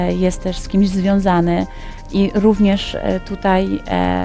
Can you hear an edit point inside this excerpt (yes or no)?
no